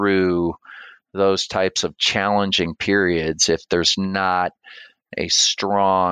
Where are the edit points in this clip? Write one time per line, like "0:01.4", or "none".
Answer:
none